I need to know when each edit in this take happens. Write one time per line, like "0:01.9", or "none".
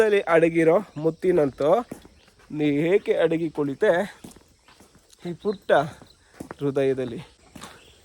0:07.1